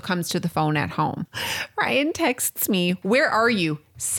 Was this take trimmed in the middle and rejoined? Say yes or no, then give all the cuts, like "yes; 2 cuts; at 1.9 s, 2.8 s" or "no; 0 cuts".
yes; 2 cuts; at 1.3 s, 3.0 s